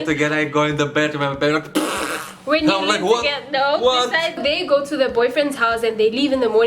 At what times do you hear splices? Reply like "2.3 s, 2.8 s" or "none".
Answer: 4.4 s